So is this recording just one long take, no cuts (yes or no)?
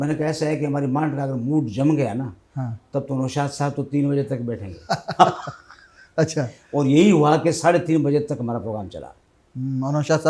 yes